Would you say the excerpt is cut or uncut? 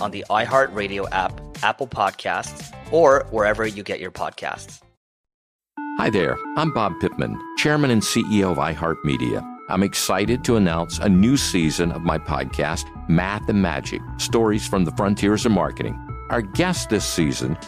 uncut